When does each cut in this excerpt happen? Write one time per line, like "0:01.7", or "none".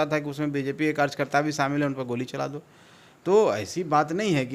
none